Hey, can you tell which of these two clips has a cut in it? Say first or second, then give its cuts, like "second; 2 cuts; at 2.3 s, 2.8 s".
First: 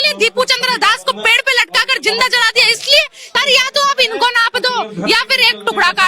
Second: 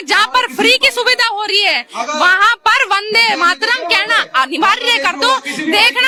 first; 1 cut; at 3.4 s